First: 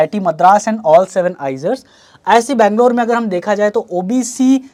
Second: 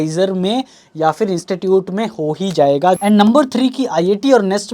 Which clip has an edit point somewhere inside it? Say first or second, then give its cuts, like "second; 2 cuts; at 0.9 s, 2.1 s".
second; 1 cut; at 3.0 s